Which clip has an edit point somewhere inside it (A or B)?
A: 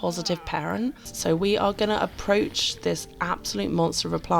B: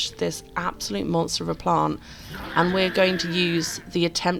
A